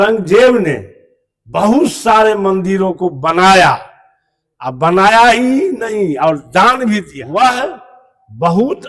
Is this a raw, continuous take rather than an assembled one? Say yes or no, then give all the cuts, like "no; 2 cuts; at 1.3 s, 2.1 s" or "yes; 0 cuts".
no; 1 cut; at 7.2 s